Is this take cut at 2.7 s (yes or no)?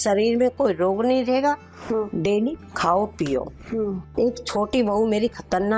no